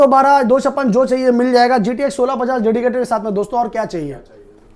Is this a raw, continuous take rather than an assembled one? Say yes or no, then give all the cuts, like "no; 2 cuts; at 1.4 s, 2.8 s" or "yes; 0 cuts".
yes; 0 cuts